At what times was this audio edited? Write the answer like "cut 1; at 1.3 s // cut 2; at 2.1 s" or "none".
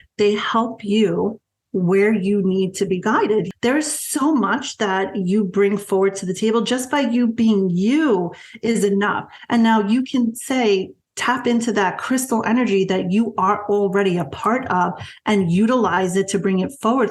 cut 1; at 3.5 s